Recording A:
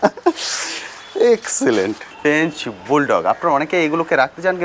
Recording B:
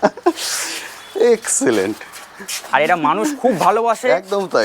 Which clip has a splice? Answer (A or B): A